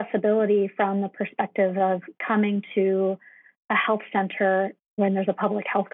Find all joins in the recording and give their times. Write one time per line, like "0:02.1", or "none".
0:04.9